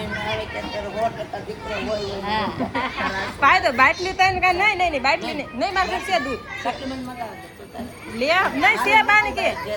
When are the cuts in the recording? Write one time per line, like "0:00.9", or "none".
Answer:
none